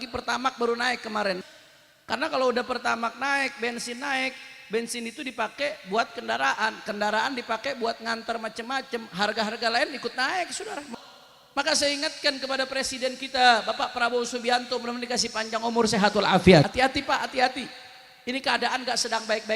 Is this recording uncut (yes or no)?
no